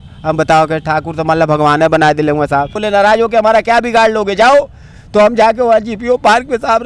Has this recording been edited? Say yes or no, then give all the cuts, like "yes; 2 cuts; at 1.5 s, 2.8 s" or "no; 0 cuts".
yes; 1 cut; at 2.8 s